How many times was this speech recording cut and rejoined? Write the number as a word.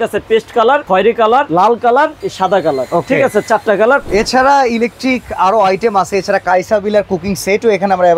three